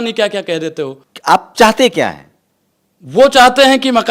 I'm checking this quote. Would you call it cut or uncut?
uncut